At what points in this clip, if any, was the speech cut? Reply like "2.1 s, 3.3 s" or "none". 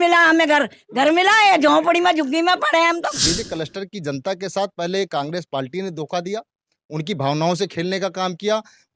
3.2 s